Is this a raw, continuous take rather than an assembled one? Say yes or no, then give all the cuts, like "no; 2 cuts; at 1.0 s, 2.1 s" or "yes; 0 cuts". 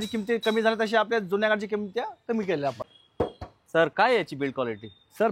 no; 1 cut; at 2.9 s